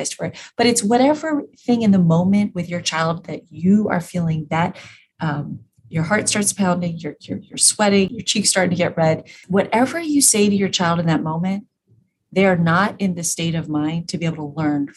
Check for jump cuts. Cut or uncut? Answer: cut